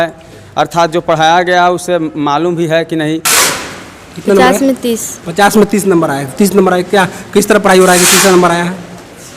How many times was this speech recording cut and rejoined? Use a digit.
1